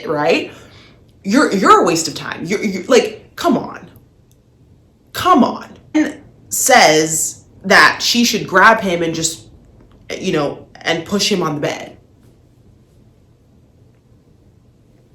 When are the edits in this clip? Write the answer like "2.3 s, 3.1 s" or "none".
5.9 s